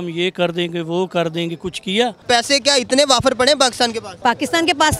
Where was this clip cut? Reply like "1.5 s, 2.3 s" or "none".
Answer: 2.2 s, 4.1 s